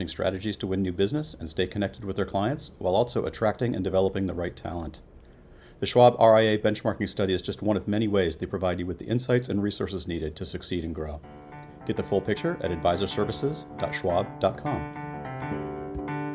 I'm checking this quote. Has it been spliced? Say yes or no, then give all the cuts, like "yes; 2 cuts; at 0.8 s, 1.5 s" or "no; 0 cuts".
yes; 1 cut; at 14.8 s